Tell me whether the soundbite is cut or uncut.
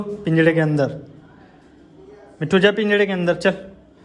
uncut